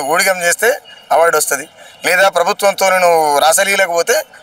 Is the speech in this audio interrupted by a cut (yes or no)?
no